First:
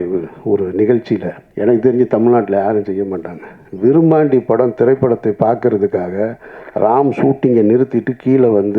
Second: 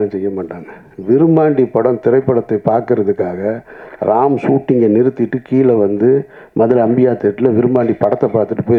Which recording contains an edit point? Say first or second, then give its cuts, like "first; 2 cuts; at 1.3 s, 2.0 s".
first; 1 cut; at 1.4 s